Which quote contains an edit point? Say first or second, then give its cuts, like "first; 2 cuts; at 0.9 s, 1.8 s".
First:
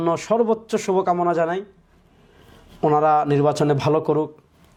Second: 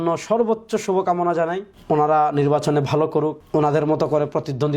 second; 2 cuts; at 1.7 s, 3.4 s